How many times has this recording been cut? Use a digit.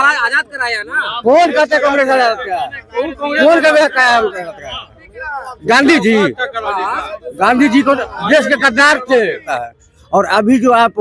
1